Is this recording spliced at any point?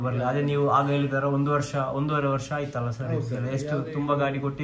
no; 0 cuts

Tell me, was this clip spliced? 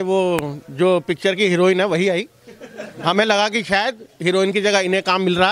no; 0 cuts

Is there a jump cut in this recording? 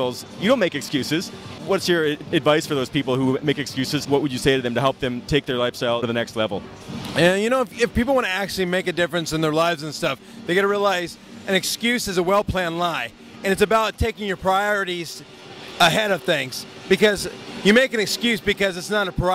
yes; 1 cut; at 8.5 s

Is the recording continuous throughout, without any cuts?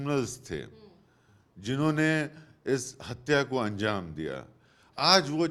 yes; 0 cuts

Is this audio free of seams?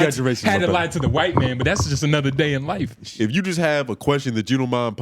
no; 1 cut; at 3.0 s

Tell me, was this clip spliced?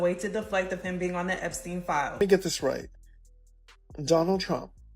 yes; 1 cut; at 2.1 s

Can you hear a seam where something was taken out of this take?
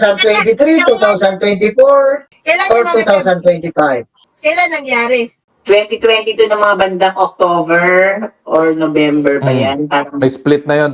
no; 0 cuts

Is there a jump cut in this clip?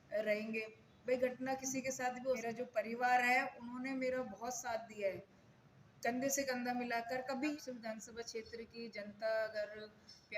yes; 2 cuts; at 2.4 s, 7.5 s

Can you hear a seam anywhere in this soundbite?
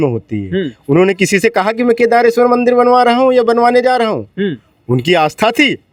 no; 0 cuts

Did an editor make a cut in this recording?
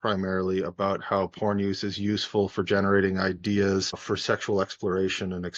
yes; 1 cut; at 4.0 s

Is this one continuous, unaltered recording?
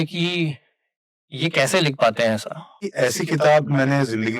no; 1 cut; at 2.9 s

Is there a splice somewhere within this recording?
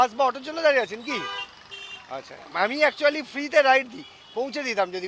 no; 0 cuts

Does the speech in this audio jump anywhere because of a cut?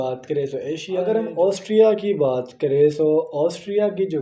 yes; 1 cut; at 1.1 s

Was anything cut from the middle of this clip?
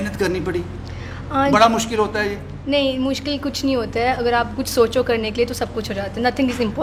no; 0 cuts

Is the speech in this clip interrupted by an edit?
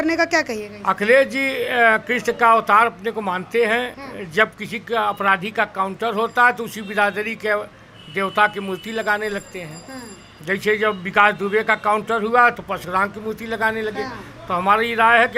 no; 0 cuts

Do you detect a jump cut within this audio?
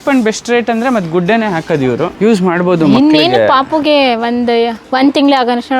yes; 2 cuts; at 2.1 s, 4.8 s

